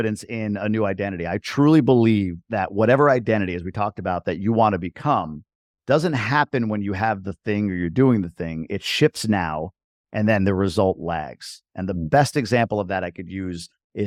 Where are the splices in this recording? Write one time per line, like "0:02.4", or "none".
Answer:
none